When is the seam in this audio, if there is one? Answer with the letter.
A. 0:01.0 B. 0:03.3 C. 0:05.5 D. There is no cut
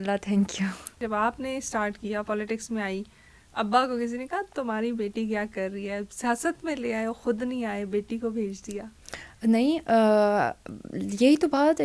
A